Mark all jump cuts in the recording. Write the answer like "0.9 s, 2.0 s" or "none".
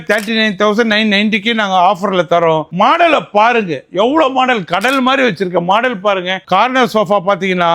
2.7 s, 6.4 s